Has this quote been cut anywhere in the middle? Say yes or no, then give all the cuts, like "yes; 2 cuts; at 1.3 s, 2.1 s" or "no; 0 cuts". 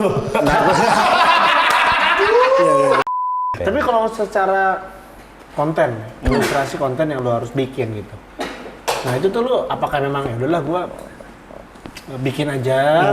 yes; 1 cut; at 3.2 s